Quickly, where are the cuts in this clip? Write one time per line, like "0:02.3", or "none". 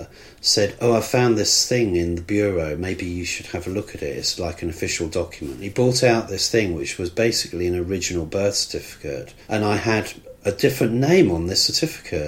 0:05.6
0:09.3